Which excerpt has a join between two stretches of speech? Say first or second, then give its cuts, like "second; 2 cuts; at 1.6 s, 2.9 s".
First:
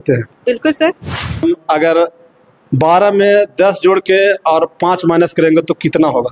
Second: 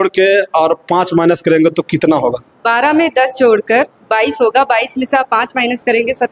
first; 1 cut; at 1.4 s